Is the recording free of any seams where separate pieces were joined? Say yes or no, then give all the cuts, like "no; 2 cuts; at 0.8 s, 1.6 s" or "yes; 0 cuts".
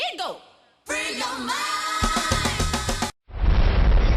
no; 1 cut; at 3.1 s